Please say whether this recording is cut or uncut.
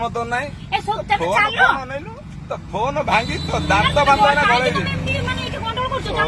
uncut